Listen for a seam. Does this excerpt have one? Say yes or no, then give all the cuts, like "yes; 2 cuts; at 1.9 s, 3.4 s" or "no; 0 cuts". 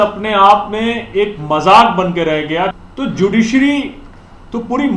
yes; 1 cut; at 2.8 s